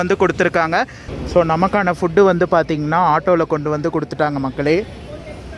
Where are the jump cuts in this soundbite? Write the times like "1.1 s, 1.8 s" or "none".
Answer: 1.0 s

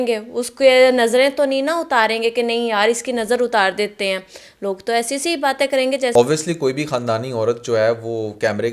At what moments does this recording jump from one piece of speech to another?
6.1 s

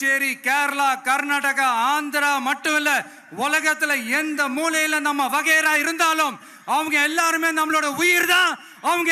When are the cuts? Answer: none

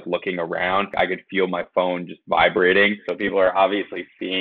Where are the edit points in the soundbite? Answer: 0.9 s, 3.1 s

